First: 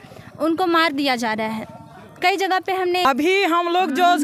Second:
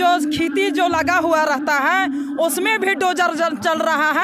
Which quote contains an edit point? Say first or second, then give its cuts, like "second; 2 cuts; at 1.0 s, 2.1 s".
first; 1 cut; at 3.0 s